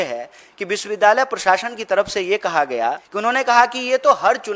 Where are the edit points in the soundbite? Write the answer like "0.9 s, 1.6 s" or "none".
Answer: 3.1 s